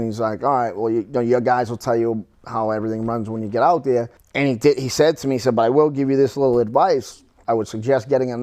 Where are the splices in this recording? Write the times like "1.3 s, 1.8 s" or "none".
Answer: 4.2 s, 7.4 s